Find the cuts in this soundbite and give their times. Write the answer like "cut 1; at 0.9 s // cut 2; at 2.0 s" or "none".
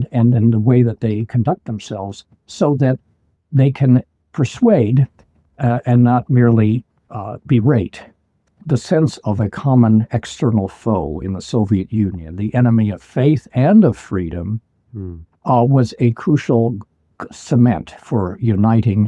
cut 1; at 8.6 s